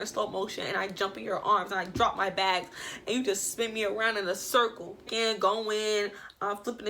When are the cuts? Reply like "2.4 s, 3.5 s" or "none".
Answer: 5.1 s

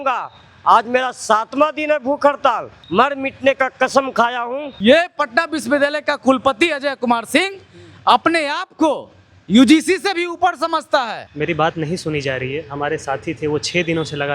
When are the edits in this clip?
2.7 s, 4.7 s, 11.2 s

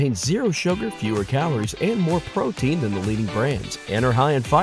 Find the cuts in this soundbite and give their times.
none

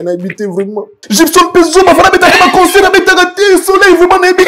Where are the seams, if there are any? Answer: 0.9 s

